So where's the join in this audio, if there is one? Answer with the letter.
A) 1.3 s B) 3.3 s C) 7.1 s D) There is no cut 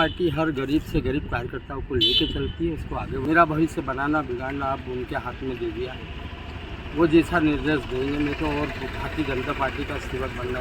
B